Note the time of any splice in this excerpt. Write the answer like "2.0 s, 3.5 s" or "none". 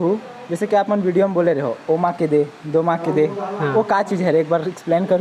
none